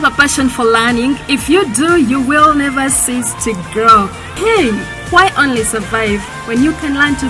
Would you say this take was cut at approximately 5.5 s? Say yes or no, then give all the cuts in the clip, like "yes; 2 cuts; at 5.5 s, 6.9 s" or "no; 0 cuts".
no; 1 cut; at 4.2 s